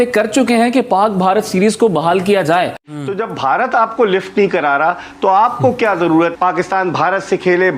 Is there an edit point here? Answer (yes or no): yes